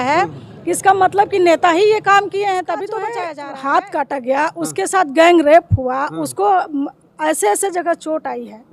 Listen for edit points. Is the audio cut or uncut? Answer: cut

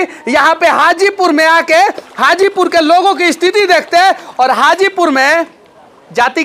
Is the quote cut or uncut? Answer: uncut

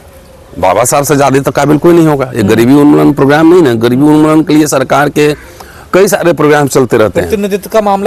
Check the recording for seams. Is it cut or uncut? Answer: uncut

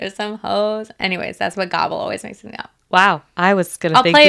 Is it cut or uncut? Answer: uncut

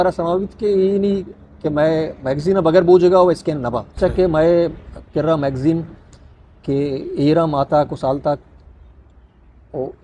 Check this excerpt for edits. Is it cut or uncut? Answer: cut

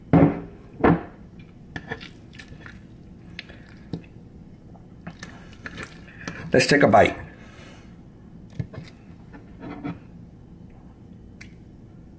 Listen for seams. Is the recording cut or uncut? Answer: uncut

